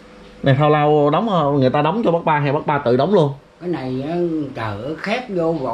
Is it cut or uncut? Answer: uncut